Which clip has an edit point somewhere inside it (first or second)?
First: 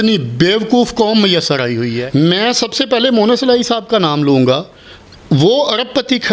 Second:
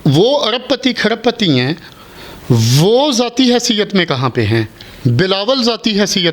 first